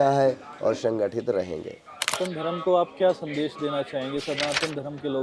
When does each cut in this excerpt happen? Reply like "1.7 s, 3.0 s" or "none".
2.1 s